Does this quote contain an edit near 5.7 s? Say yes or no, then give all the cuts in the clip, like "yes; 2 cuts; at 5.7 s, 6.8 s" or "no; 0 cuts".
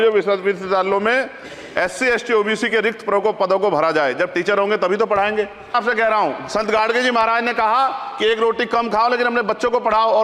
yes; 1 cut; at 5.7 s